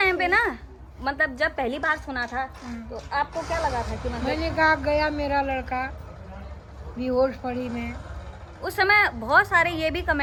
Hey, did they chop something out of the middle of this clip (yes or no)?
no